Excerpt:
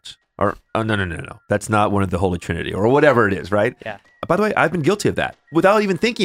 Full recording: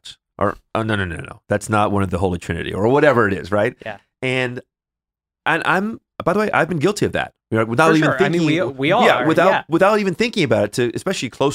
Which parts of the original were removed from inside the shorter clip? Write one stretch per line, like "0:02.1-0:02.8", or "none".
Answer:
0:04.1-0:06.1
0:07.4-0:09.6